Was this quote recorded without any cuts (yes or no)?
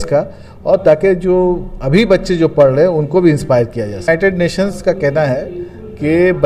yes